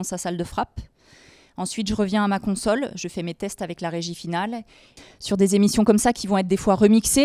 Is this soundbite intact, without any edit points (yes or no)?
no